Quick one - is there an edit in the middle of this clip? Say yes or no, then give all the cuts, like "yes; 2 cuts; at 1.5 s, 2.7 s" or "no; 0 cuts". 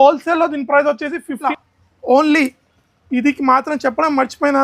yes; 1 cut; at 1.5 s